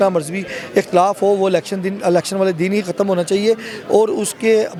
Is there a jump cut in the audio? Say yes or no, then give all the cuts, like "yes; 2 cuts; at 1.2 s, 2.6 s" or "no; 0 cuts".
no; 0 cuts